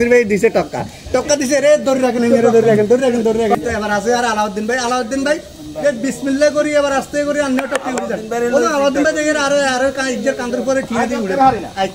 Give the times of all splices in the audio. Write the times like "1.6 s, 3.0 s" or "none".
3.6 s